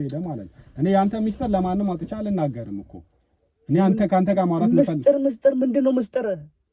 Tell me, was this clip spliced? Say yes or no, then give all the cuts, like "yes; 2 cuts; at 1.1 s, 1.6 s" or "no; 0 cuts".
no; 0 cuts